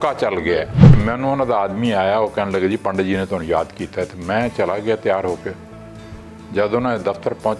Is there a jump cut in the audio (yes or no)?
yes